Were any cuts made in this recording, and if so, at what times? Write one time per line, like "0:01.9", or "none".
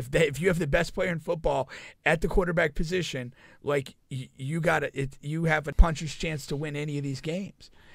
0:05.7